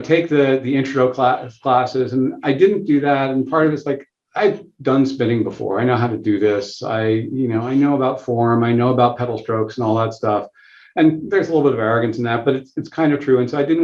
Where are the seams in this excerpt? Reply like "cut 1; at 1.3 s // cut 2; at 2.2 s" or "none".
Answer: none